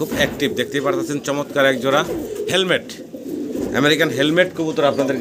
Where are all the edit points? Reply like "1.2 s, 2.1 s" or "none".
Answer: none